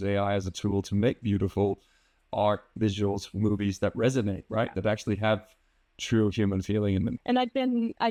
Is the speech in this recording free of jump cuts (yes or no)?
yes